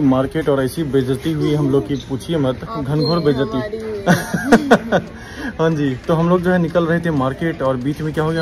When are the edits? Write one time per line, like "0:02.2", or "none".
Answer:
none